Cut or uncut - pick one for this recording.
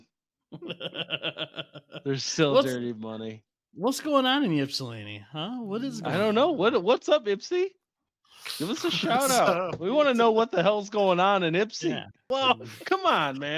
cut